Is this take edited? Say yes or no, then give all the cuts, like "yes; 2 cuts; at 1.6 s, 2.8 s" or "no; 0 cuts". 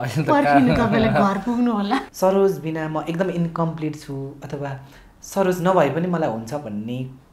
yes; 1 cut; at 2.0 s